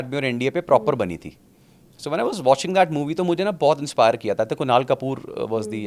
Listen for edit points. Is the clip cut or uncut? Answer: uncut